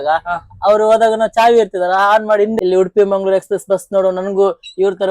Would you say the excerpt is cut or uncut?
cut